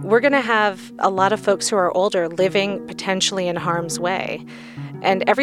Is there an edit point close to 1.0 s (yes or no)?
yes